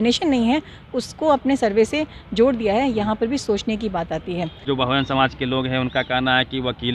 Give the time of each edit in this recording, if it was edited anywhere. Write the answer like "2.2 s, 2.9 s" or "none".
4.6 s